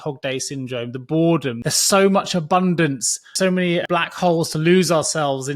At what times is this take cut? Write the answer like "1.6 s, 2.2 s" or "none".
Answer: 1.6 s, 3.6 s

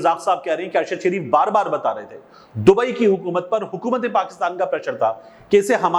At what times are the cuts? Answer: none

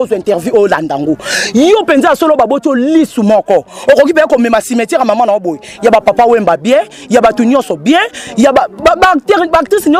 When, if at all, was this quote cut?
none

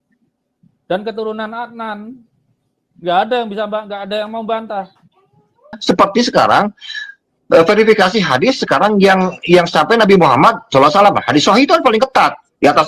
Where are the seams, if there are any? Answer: 5.8 s

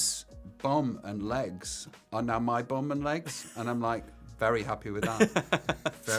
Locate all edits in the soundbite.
none

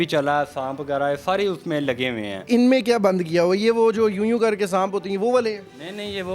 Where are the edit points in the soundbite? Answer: 2.5 s

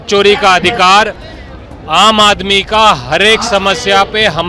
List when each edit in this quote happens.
none

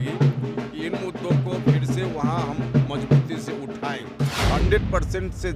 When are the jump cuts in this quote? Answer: 4.3 s

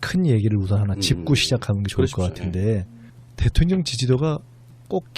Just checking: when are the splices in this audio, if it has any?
2.9 s

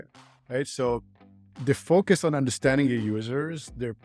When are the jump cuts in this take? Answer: none

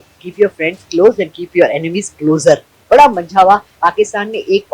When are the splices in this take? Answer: 2.7 s, 3.7 s

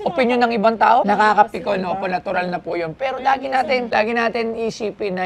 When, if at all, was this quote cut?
1.1 s, 3.9 s

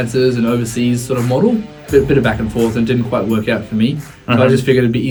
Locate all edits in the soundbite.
none

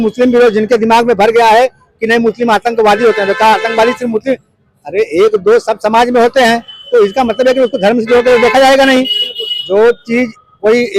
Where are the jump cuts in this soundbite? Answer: none

